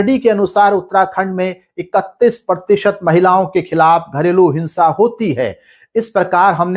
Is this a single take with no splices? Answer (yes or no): yes